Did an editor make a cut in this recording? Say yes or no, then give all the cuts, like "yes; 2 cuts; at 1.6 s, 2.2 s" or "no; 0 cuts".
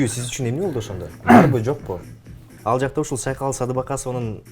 yes; 1 cut; at 2.5 s